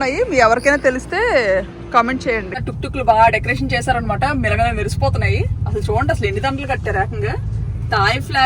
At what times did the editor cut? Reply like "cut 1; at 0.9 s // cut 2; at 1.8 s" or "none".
cut 1; at 2.5 s